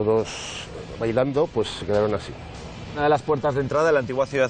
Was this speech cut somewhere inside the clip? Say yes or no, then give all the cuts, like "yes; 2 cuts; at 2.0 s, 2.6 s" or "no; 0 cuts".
yes; 1 cut; at 3.0 s